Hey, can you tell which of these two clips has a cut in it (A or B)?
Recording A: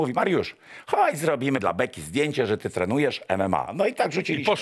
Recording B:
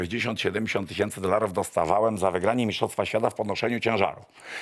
A